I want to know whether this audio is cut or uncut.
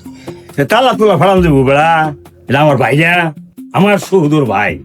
cut